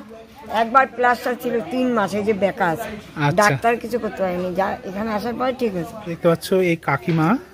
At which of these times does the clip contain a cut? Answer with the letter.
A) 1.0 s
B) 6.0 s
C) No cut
B